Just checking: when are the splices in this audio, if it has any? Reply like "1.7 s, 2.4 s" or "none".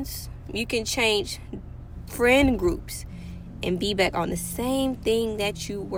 none

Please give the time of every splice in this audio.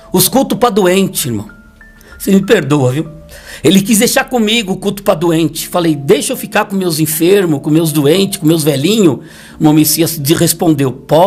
none

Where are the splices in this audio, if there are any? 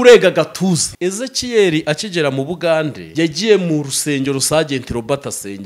0.9 s, 3.0 s

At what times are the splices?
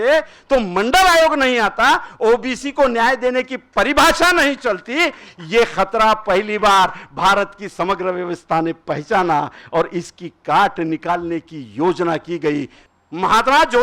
12.8 s

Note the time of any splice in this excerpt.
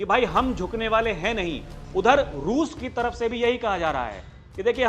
none

